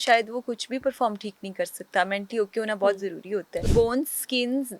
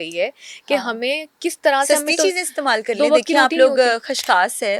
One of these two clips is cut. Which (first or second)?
first